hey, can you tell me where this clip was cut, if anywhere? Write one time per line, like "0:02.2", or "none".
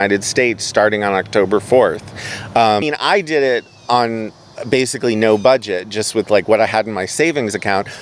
0:02.8